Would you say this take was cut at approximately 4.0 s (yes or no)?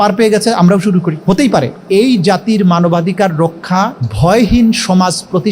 yes